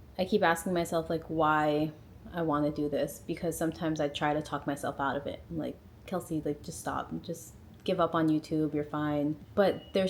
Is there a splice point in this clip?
no; 0 cuts

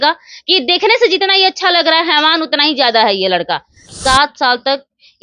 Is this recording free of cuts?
no; 1 cut; at 3.9 s

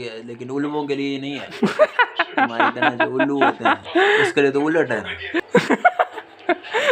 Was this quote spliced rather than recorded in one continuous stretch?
yes; 1 cut; at 5.5 s

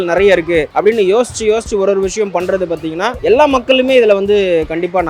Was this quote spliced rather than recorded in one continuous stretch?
no; 0 cuts

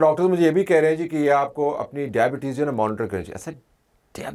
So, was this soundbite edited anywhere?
no; 0 cuts

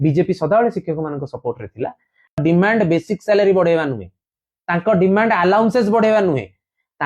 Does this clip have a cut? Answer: yes; 1 cut; at 2.4 s

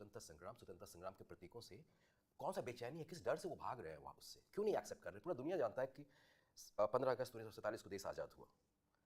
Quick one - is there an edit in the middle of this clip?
no; 0 cuts

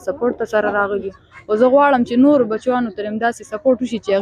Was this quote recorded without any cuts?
yes; 0 cuts

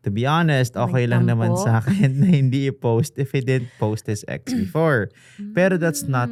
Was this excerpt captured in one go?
yes; 0 cuts

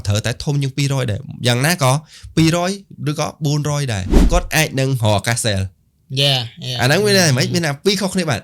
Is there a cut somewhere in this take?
yes; 1 cut; at 4.1 s

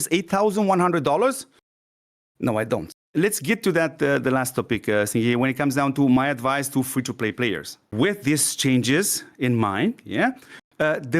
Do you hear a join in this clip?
yes; 2 cuts; at 2.9 s, 7.9 s

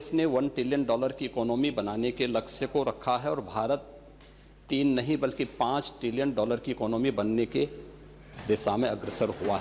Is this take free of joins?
yes; 0 cuts

